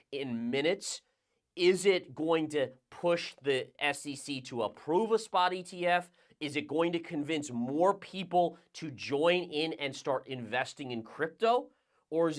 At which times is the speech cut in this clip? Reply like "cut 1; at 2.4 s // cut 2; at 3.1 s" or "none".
none